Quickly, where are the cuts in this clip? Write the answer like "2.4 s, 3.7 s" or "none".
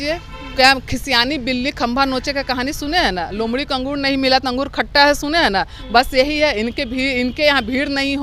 none